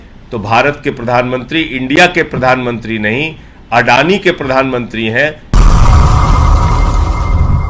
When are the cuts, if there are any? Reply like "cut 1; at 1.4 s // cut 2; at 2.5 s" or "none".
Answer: cut 1; at 5.4 s